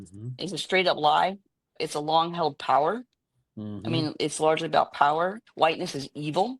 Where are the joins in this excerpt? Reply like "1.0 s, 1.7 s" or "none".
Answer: 1.8 s, 5.4 s